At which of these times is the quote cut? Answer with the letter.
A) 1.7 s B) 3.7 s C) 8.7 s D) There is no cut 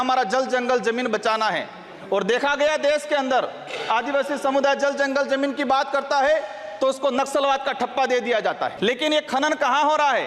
C